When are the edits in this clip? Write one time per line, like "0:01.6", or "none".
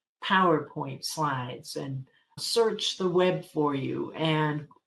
0:02.4